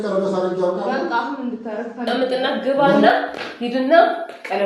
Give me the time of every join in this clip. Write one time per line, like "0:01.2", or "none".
0:02.1